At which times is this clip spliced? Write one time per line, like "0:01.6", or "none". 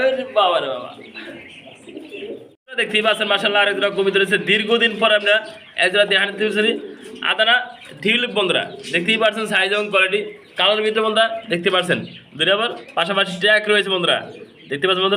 none